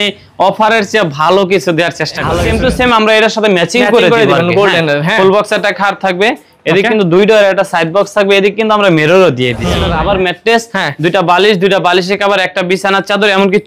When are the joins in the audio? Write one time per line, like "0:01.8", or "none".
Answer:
0:02.4
0:09.8

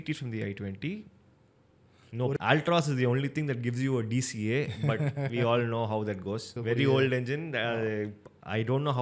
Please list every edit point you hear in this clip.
0:02.4
0:06.5

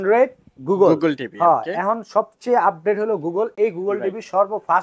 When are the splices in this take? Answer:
none

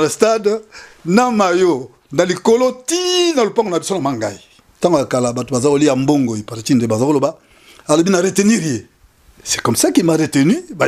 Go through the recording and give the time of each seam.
0:04.6

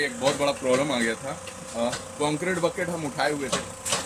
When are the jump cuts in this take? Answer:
none

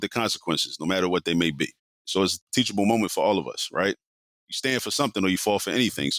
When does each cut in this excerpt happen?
none

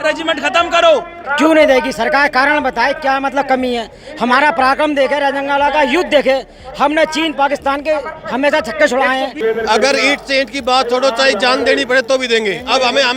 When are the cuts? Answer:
0:01.2
0:09.4

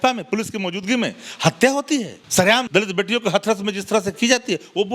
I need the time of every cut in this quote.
0:02.5

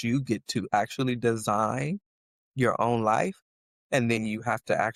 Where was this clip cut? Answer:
none

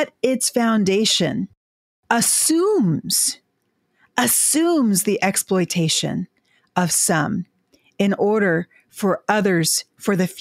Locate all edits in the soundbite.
none

